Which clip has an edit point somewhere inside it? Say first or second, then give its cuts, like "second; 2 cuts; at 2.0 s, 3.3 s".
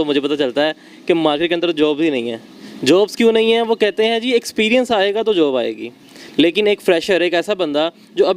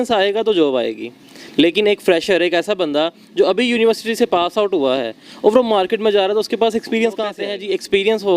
second; 1 cut; at 7.3 s